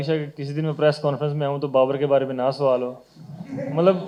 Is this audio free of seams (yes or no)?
yes